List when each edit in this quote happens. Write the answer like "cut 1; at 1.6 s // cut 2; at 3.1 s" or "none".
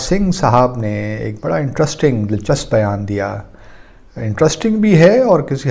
none

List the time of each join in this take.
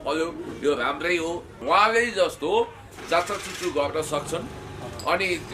cut 1; at 1.5 s

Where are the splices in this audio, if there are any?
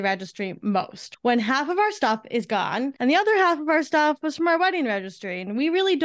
cut 1; at 1.0 s // cut 2; at 2.9 s

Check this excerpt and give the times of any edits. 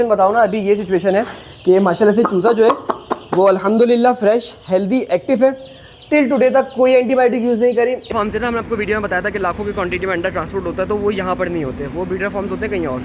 cut 1; at 8.1 s

